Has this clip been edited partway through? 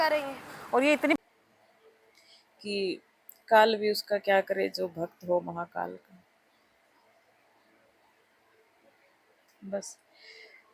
yes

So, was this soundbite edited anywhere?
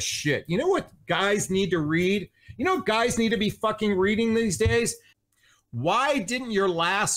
yes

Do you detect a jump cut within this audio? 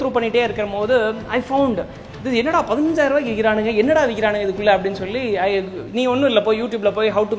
no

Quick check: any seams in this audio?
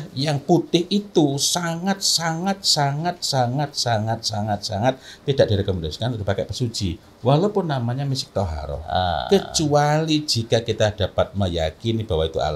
no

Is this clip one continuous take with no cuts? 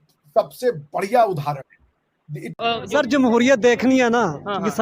no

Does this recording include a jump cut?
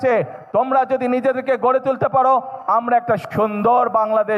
no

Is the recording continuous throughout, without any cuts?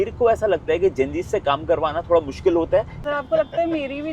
no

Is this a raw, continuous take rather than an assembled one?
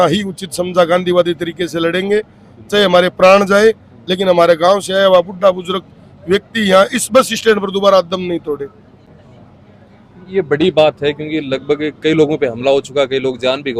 yes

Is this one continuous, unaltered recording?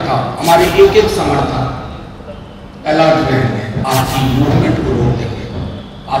no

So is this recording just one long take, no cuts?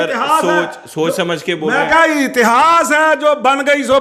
yes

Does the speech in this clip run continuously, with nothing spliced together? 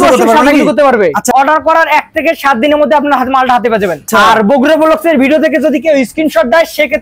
no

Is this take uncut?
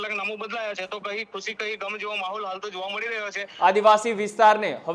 no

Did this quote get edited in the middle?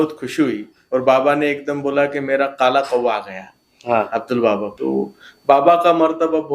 yes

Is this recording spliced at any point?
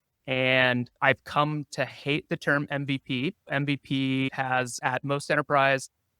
yes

